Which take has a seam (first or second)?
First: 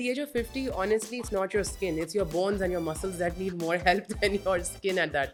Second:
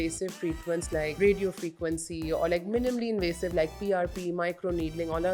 second